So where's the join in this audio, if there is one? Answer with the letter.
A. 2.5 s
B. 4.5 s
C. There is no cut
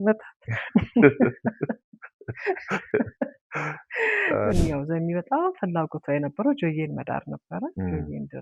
B